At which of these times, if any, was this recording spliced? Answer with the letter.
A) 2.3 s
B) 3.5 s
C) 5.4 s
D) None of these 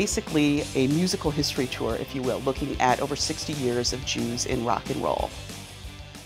C